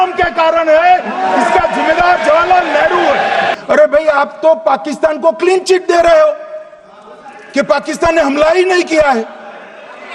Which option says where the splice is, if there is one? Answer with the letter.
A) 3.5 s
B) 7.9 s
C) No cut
A